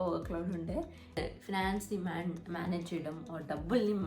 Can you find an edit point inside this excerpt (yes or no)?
yes